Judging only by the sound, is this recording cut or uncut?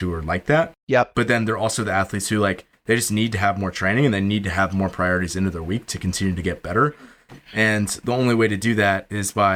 uncut